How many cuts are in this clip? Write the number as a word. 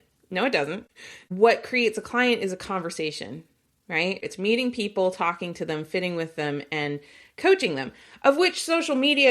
two